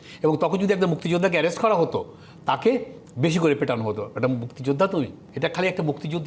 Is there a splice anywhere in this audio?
yes; 1 cut; at 5.2 s

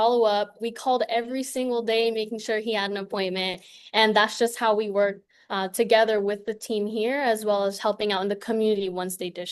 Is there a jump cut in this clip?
no; 0 cuts

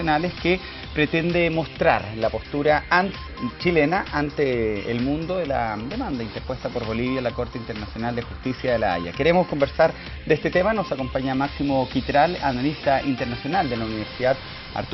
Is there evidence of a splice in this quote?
yes; 1 cut; at 14.0 s

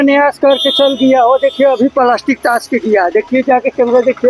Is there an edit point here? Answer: no; 0 cuts

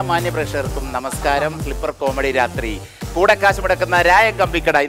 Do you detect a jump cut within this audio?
no; 0 cuts

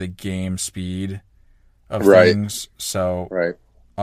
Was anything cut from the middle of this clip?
no; 0 cuts

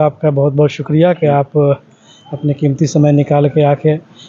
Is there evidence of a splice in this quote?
no; 0 cuts

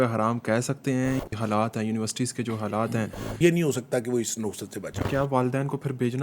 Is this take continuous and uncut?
no; 3 cuts; at 1.3 s, 3.2 s, 5.0 s

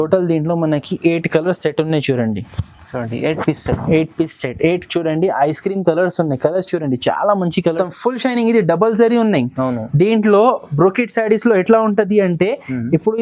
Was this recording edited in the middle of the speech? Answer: yes; 1 cut; at 7.7 s

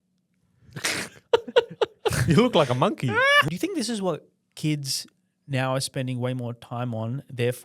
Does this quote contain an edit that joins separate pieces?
yes; 1 cut; at 3.5 s

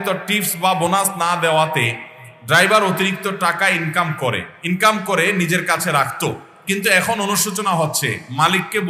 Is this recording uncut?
no; 1 cut; at 4.5 s

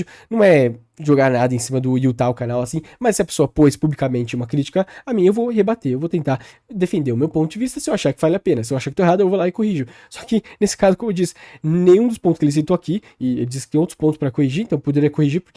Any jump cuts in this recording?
no; 0 cuts

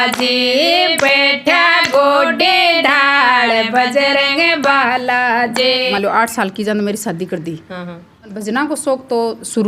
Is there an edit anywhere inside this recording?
yes; 2 cuts; at 5.9 s, 8.3 s

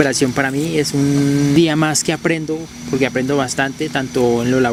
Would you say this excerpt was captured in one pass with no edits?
yes; 0 cuts

